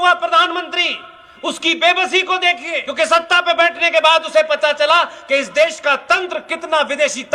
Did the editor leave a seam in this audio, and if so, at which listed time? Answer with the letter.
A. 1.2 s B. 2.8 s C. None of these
B